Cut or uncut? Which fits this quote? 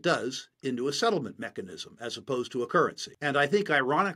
cut